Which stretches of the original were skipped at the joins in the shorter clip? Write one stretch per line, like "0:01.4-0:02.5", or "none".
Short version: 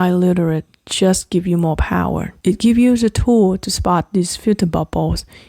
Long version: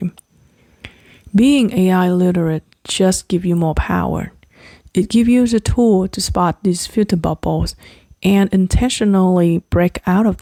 0:04.3-0:04.8